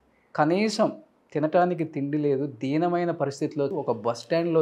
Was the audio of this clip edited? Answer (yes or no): yes